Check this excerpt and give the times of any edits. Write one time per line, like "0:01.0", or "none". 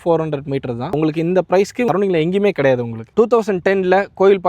0:03.1